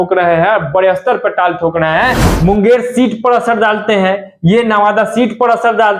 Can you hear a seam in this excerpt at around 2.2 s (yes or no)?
yes